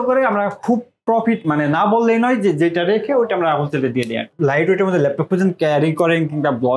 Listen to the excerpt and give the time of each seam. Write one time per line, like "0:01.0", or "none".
0:04.2